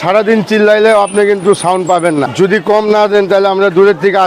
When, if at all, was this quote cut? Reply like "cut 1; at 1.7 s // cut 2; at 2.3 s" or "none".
cut 1; at 2.3 s